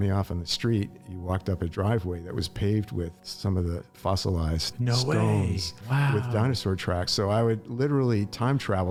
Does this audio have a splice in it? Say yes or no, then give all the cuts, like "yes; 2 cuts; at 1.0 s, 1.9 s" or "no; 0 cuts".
no; 0 cuts